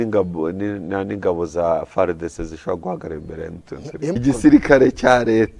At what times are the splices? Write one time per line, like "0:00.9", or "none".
0:04.2